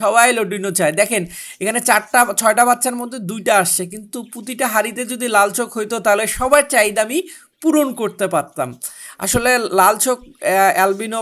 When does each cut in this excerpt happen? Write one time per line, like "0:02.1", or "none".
none